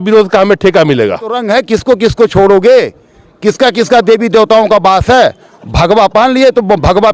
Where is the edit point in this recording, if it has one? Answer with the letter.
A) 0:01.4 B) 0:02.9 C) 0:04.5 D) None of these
A